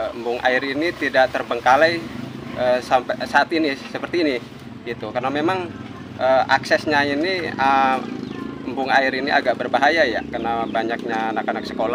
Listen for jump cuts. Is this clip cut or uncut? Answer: uncut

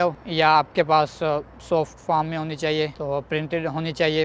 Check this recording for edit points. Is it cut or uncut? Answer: uncut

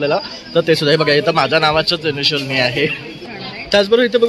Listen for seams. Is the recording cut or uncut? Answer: cut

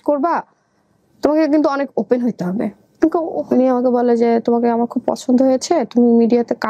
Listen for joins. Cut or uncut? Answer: cut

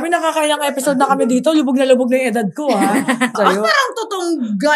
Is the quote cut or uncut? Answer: cut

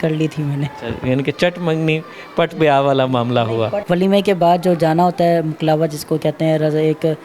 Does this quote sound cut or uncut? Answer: cut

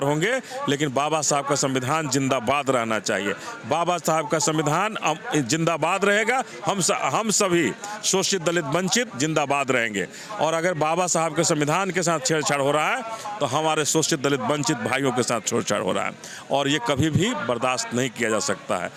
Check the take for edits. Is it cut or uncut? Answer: uncut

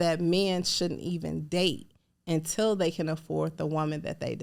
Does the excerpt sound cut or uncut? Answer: uncut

